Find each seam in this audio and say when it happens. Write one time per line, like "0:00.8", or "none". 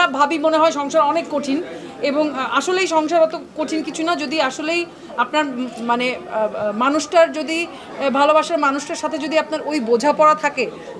none

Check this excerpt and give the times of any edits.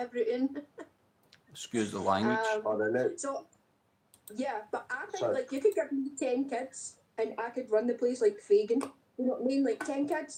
none

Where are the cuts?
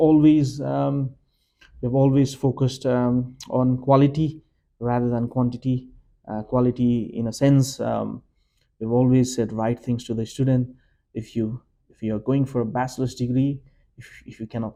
none

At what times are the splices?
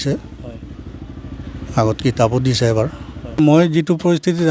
0:03.4

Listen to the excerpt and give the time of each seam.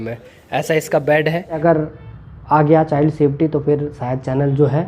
0:01.6

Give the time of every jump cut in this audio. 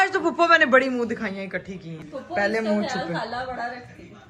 0:02.0

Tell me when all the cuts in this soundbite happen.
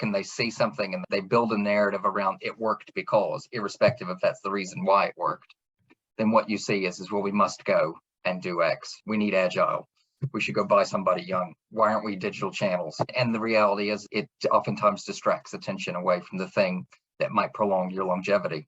0:13.1
0:14.1

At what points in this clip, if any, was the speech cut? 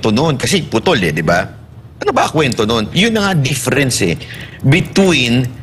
none

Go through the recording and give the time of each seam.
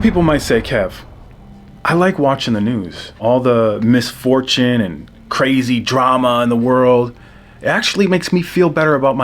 0:03.2

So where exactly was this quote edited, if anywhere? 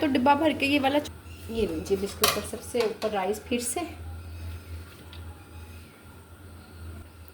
0:01.1

